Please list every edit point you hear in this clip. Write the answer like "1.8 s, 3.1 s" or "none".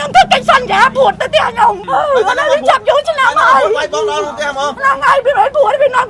1.8 s